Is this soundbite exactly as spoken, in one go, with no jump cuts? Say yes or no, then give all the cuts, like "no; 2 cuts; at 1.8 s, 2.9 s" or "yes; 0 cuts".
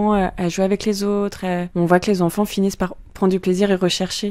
no; 1 cut; at 1.7 s